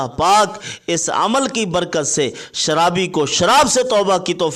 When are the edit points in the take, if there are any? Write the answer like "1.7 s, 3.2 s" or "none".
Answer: none